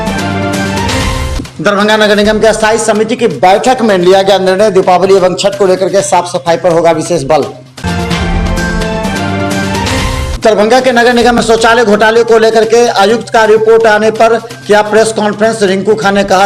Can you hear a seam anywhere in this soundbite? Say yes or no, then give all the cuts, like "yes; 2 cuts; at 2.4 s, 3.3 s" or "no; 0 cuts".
yes; 1 cut; at 1.3 s